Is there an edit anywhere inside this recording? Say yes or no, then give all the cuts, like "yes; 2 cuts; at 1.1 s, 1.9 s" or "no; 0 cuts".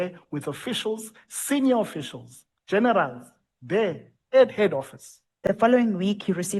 yes; 1 cut; at 5.4 s